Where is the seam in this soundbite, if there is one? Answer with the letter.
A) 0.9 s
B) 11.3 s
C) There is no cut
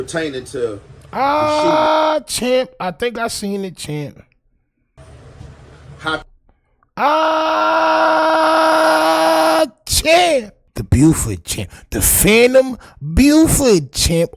A